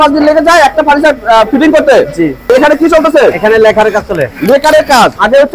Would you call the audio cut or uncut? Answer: uncut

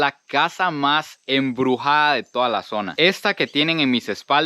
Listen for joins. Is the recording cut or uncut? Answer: cut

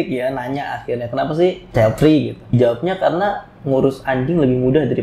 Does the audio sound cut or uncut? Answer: cut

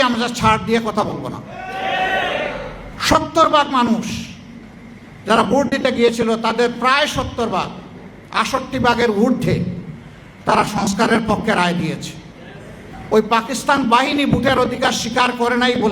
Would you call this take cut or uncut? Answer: cut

